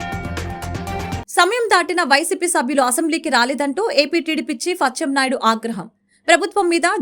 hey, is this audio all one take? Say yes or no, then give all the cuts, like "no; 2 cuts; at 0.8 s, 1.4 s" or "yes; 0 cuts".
no; 1 cut; at 1.2 s